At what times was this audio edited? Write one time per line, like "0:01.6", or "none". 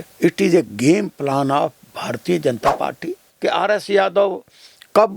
0:03.1